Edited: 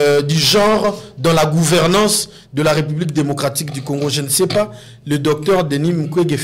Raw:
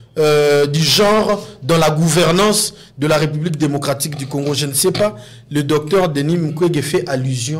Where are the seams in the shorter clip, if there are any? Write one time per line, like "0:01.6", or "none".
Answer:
none